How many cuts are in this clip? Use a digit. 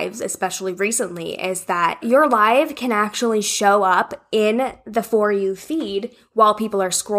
1